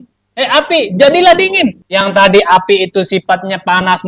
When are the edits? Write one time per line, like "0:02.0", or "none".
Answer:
0:01.8